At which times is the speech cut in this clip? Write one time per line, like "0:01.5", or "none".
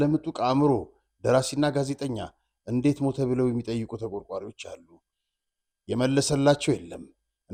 none